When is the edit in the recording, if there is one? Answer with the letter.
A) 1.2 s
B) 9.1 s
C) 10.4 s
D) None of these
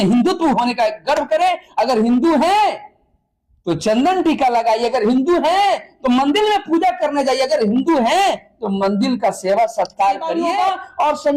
C